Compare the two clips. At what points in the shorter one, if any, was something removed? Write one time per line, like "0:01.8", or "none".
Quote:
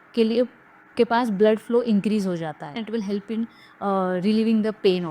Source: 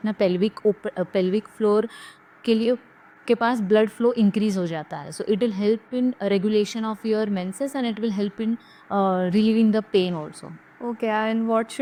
0:02.8

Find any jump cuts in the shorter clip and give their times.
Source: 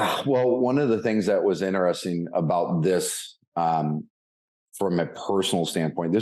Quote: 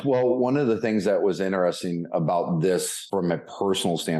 0:03.0

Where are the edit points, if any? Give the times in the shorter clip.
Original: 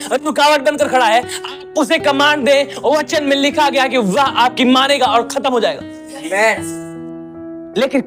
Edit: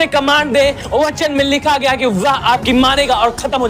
none

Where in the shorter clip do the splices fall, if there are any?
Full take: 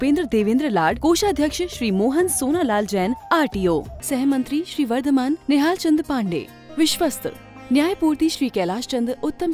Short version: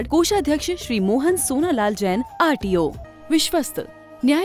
0:03.1

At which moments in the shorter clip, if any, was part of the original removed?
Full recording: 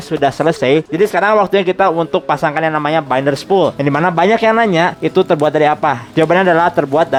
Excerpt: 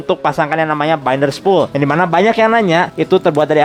none

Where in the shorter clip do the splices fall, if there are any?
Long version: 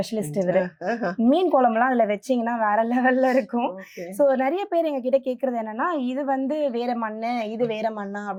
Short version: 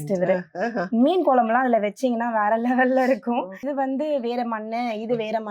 0:03.6

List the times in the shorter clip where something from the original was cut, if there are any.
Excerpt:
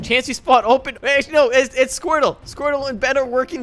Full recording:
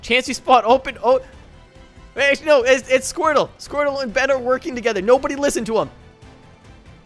0:00.9

